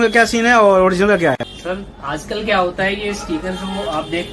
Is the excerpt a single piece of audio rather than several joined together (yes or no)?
no